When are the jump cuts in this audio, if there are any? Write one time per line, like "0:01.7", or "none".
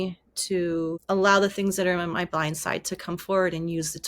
0:01.0